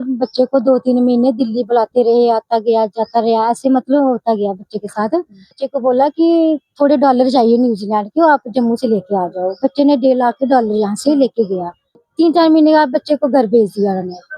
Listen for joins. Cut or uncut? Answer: cut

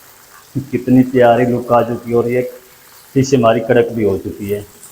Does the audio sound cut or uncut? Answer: uncut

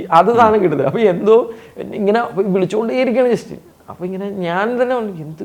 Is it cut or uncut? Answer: uncut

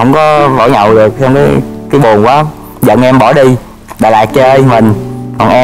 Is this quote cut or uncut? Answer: uncut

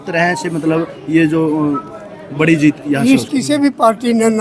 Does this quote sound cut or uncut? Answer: cut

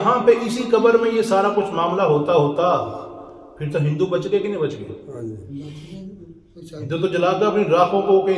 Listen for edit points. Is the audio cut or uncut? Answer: uncut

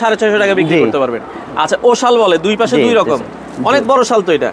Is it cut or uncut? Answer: uncut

